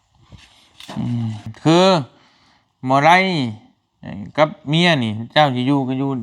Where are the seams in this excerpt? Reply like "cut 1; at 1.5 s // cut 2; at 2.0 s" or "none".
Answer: cut 1; at 1.5 s

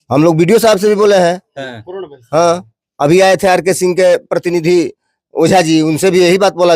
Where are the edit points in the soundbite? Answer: none

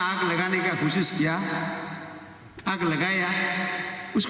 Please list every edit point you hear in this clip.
none

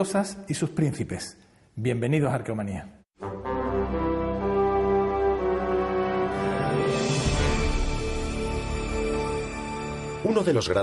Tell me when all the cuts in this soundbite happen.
cut 1; at 5.5 s

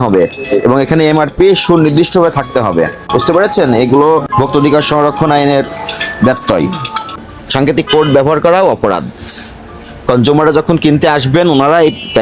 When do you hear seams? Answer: cut 1; at 3.0 s // cut 2; at 4.3 s // cut 3; at 7.2 s

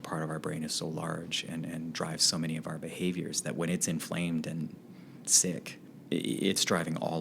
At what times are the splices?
cut 1; at 5.8 s

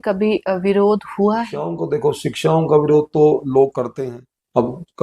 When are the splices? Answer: cut 1; at 1.8 s // cut 2; at 3.9 s

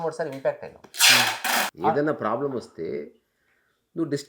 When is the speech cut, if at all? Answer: cut 1; at 1.7 s

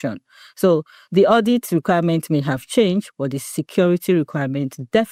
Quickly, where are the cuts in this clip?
none

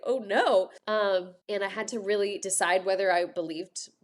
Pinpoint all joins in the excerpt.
cut 1; at 1.3 s // cut 2; at 2.4 s // cut 3; at 3.3 s

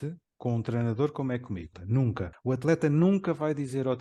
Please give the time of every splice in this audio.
cut 1; at 1.9 s

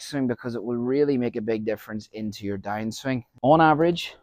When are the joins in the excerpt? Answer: cut 1; at 3.3 s

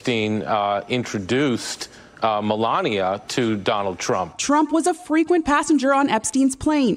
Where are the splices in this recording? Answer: none

